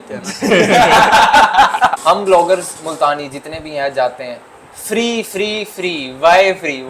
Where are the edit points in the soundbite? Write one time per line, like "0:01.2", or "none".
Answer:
0:02.0